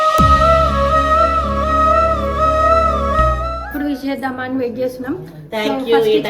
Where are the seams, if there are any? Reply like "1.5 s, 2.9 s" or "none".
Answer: 3.6 s